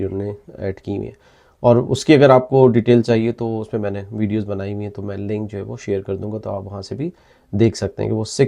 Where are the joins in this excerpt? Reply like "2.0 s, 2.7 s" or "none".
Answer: none